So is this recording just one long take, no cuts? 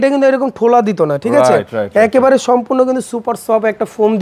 yes; 0 cuts

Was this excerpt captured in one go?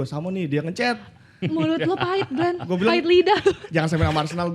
yes; 0 cuts

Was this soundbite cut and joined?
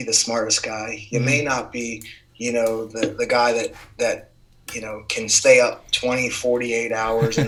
no; 0 cuts

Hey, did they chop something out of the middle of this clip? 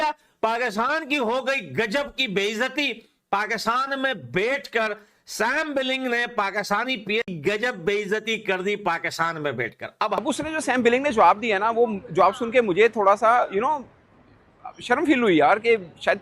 yes; 2 cuts; at 7.3 s, 10.2 s

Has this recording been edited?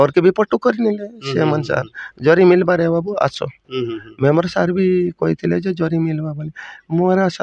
no; 0 cuts

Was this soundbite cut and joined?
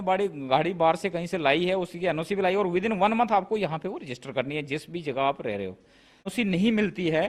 yes; 1 cut; at 6.3 s

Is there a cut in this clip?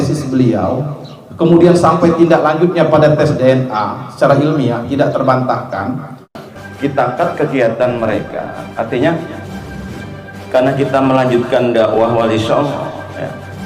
yes; 1 cut; at 6.3 s

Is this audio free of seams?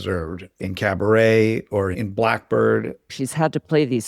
no; 1 cut; at 3.1 s

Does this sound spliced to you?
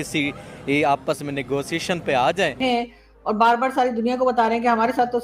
yes; 1 cut; at 2.5 s

